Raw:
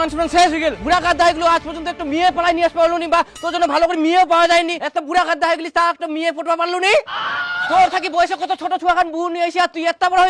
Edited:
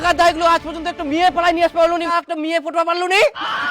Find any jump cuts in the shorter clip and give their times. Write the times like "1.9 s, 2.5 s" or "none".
2.1 s